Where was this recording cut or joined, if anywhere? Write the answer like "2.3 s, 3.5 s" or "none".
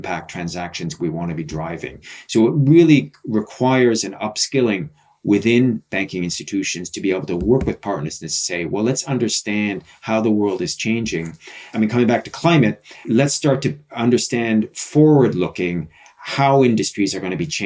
11.6 s, 13.1 s